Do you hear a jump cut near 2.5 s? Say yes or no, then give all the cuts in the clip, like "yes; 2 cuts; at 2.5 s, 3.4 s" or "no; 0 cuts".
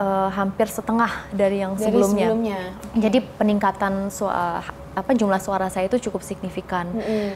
no; 0 cuts